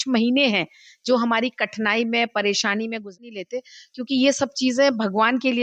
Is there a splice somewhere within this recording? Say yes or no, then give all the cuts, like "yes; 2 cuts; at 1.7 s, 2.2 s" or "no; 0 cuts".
yes; 1 cut; at 3.1 s